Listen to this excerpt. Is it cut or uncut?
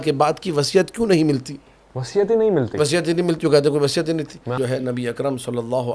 cut